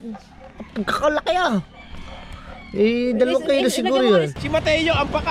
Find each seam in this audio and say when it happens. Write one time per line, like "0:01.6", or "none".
0:04.4